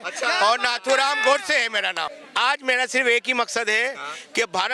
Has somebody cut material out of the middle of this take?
yes; 1 cut; at 2.1 s

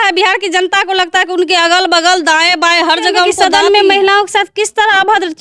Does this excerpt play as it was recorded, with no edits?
no; 1 cut; at 3.3 s

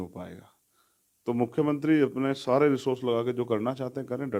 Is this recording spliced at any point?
no; 0 cuts

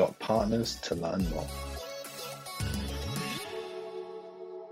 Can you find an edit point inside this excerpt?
yes; 1 cut; at 1.5 s

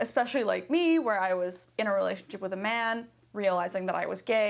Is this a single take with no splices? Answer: yes; 0 cuts

